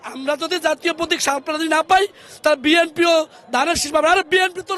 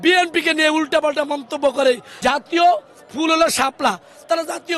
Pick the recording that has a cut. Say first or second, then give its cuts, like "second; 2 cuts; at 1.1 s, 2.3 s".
second; 1 cut; at 2.1 s